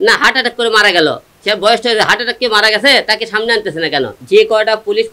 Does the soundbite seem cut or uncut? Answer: cut